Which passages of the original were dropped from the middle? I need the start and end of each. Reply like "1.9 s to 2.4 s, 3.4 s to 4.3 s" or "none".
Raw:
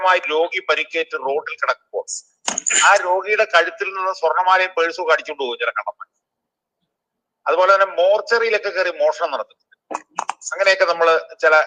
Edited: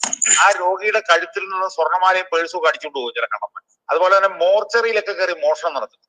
6.1 s to 7.2 s